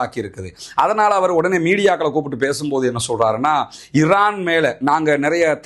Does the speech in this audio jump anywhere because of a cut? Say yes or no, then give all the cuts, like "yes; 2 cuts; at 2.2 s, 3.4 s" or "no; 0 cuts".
no; 0 cuts